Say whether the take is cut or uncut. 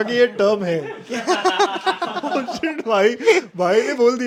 uncut